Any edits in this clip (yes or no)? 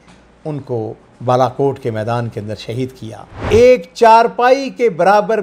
yes